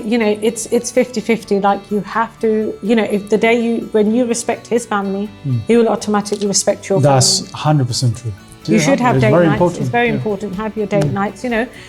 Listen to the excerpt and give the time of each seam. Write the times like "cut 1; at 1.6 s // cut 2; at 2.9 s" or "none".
cut 1; at 8.6 s